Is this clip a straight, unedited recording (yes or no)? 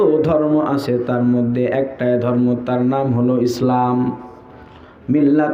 yes